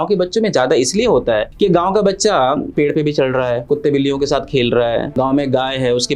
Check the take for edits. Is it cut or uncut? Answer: cut